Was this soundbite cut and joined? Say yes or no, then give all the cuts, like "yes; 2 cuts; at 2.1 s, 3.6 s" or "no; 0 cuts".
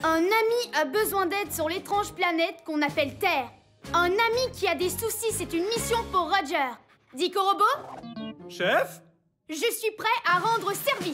no; 0 cuts